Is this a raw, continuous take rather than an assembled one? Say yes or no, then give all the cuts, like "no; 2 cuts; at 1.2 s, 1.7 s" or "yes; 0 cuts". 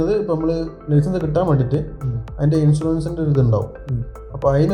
yes; 0 cuts